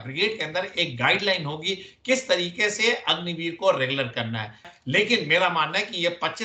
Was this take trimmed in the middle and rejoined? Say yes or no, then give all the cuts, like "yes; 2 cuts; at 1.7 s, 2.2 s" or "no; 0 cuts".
yes; 1 cut; at 4.7 s